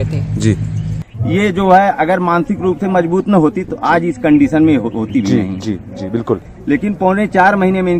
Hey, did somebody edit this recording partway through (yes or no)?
yes